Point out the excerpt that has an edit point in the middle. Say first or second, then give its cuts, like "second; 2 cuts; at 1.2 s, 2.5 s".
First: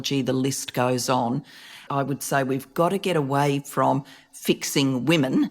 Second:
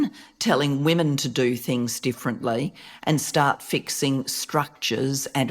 first; 1 cut; at 1.8 s